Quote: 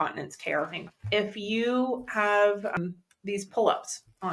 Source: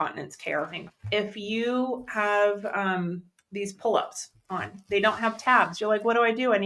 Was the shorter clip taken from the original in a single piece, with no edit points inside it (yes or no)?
no